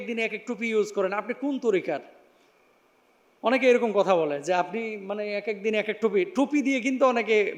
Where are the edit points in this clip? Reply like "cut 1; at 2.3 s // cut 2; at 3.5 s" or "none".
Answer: none